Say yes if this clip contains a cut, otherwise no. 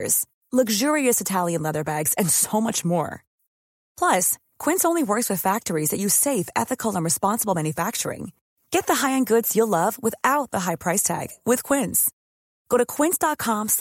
no